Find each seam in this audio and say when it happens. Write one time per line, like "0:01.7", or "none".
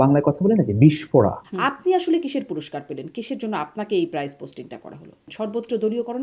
0:01.5
0:05.3